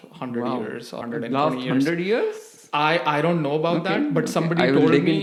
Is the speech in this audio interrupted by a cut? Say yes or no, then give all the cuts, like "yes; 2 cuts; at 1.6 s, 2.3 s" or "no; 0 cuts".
no; 0 cuts